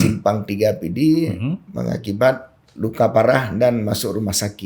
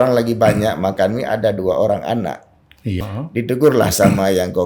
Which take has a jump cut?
second; 1 cut; at 3.0 s

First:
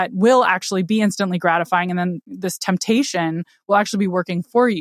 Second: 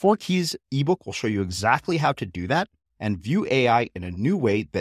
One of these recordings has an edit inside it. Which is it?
first; 1 cut; at 2.3 s

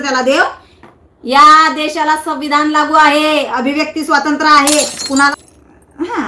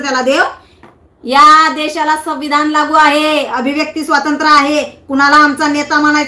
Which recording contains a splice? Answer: first; 1 cut; at 5.3 s

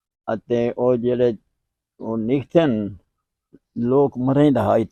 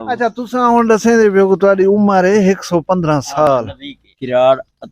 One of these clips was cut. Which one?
second; 1 cut; at 3.5 s

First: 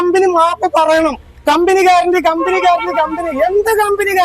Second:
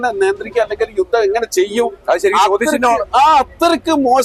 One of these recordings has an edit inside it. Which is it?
first; 1 cut; at 1.3 s

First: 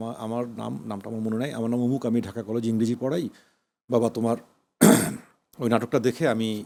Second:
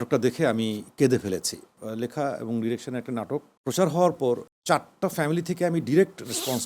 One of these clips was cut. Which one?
second; 3 cuts; at 1.8 s, 3.5 s, 4.5 s

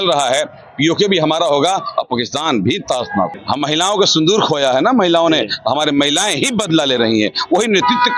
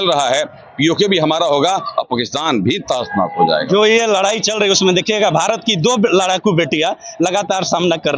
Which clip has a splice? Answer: first; 1 cut; at 3.3 s

